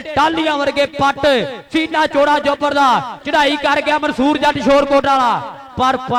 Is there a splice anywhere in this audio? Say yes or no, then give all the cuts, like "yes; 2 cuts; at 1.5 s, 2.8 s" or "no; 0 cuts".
no; 0 cuts